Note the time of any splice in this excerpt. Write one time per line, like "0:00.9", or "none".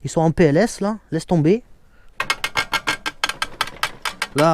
0:02.1